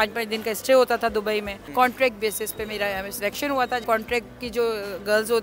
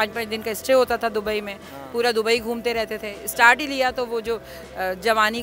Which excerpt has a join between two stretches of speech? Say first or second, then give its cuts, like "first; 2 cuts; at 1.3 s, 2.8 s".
first; 2 cuts; at 1.6 s, 3.8 s